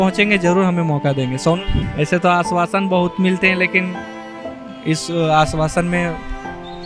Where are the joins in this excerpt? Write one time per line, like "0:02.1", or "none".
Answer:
0:01.8